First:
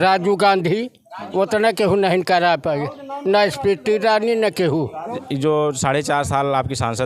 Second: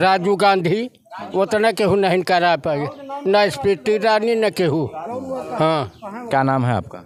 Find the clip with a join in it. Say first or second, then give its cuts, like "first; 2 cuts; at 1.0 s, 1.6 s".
first; 1 cut; at 5.2 s